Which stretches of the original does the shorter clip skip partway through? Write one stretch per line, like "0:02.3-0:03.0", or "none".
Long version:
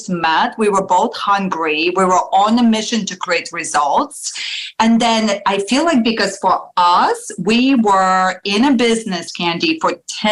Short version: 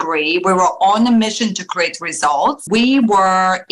0:04.1-0:07.4